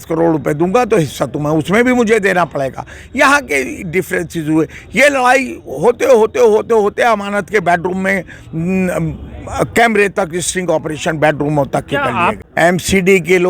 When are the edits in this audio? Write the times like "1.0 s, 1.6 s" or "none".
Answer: 12.4 s